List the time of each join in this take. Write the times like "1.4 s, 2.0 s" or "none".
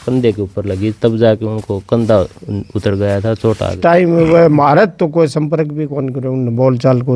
3.7 s